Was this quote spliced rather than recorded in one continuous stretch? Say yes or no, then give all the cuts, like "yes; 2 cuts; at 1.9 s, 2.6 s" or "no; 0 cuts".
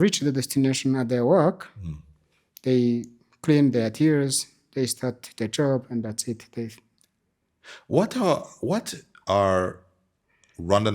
no; 0 cuts